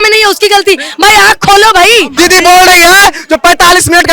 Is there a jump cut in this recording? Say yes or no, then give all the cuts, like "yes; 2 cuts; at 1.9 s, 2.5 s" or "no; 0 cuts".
yes; 1 cut; at 2.1 s